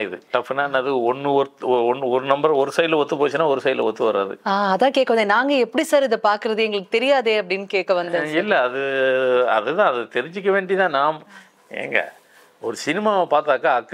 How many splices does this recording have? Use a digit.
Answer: 0